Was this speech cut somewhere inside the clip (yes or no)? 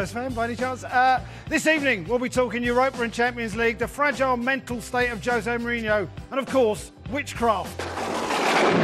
no